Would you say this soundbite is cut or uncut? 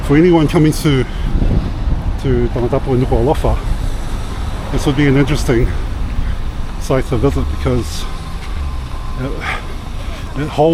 uncut